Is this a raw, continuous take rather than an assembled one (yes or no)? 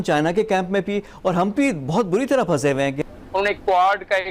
no